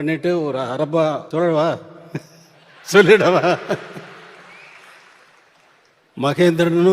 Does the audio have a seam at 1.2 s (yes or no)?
yes